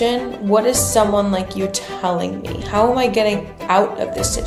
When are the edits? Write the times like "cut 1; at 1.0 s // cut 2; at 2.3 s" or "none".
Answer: none